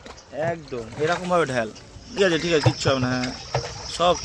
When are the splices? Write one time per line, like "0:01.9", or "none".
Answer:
0:02.2